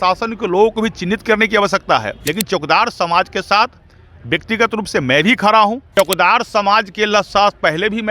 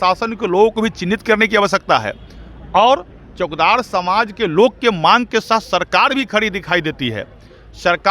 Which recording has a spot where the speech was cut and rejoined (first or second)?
first